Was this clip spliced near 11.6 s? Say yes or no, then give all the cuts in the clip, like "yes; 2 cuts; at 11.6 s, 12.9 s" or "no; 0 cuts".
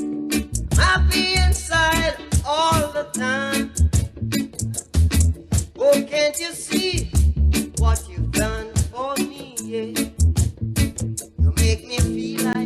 yes; 1 cut; at 11.6 s